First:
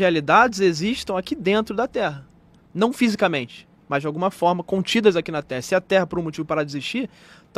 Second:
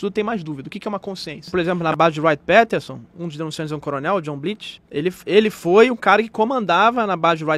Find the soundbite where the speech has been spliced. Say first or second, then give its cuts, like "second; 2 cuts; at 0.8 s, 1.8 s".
second; 2 cuts; at 1.5 s, 4.7 s